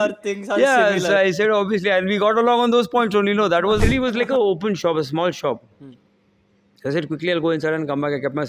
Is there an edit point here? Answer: yes; 1 cut; at 3.8 s

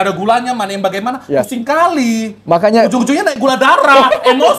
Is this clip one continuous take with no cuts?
yes; 0 cuts

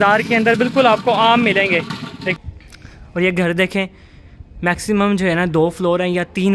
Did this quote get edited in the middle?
yes; 1 cut; at 2.3 s

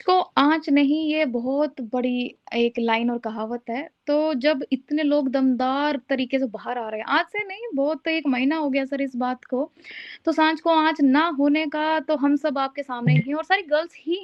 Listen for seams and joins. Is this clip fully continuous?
yes; 0 cuts

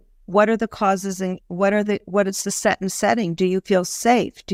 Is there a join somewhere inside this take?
no; 0 cuts

